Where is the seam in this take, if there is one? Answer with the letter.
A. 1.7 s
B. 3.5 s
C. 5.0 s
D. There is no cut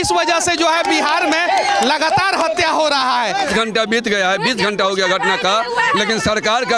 B